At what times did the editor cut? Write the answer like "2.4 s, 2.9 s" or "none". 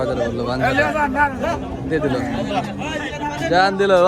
none